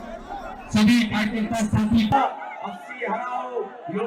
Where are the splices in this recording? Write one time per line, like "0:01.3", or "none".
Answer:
0:02.1